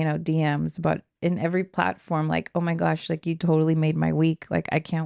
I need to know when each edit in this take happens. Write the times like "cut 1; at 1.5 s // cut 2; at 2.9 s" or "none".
none